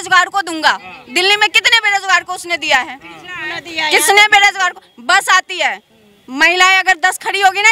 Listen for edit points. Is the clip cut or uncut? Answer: uncut